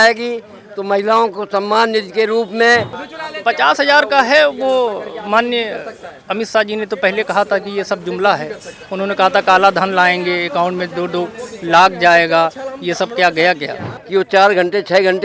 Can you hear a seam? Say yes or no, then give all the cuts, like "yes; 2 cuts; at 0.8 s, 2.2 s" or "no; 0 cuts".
yes; 2 cuts; at 3.0 s, 13.9 s